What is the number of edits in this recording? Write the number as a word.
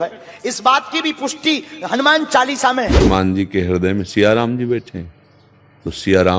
one